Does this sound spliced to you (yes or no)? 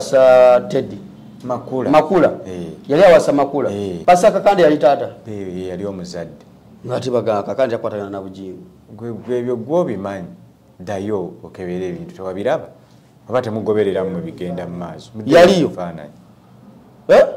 yes